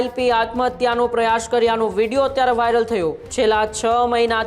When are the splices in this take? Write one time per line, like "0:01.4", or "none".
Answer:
0:03.2